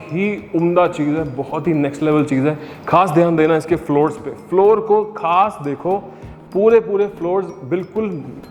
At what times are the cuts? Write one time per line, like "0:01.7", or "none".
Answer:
none